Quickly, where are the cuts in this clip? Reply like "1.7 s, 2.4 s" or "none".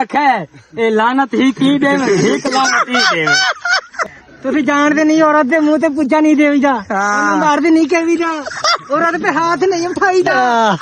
4.0 s